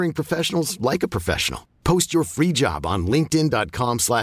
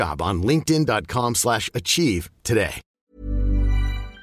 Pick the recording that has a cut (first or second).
second